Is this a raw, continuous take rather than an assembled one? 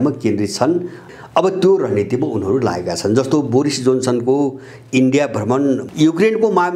no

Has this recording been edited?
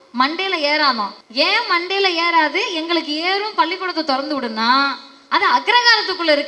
yes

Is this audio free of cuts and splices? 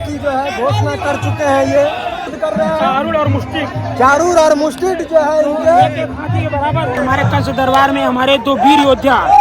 no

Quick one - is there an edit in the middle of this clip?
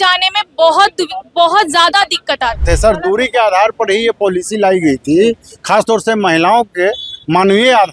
yes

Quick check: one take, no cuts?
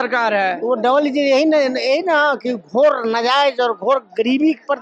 yes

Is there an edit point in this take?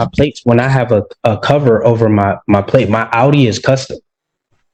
no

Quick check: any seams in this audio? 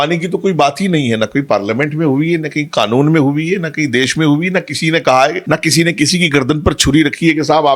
yes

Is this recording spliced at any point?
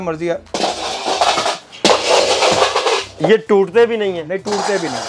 yes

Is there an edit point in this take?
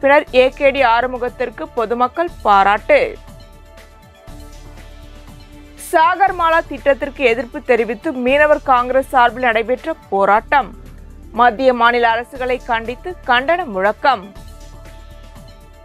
yes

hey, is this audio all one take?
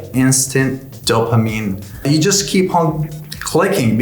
no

